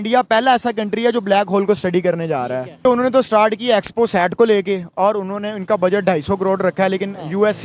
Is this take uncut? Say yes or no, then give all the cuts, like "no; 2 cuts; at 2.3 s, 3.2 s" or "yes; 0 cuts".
yes; 0 cuts